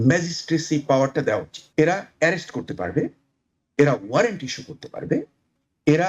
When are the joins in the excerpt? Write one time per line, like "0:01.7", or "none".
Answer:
0:01.6